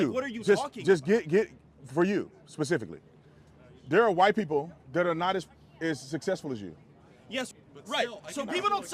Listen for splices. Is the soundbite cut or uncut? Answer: cut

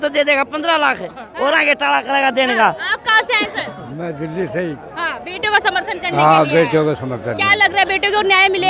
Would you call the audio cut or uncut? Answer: uncut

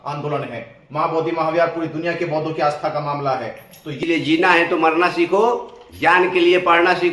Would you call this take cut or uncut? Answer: cut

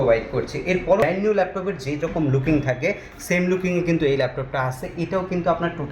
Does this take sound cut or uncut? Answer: cut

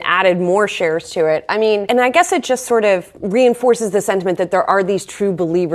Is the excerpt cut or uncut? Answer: cut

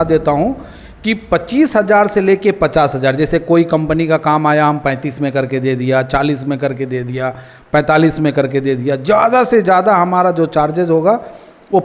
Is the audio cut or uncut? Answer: uncut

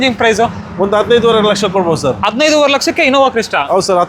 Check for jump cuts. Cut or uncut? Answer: uncut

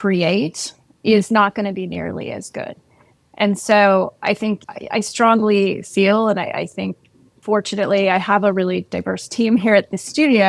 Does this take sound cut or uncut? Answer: uncut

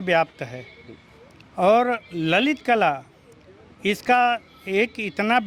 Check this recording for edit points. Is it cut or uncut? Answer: uncut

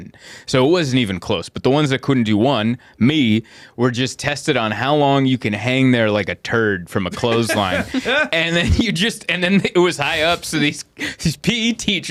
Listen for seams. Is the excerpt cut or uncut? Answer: uncut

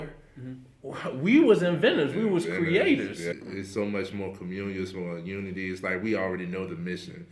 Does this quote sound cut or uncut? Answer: cut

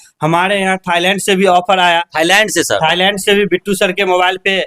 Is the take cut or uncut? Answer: uncut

